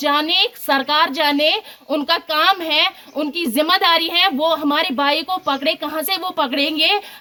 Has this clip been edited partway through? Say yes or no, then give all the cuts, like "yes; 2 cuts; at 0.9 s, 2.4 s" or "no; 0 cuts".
no; 0 cuts